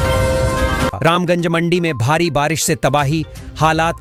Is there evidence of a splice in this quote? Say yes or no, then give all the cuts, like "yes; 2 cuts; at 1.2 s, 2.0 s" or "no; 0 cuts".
no; 0 cuts